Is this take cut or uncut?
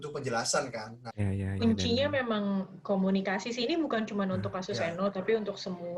cut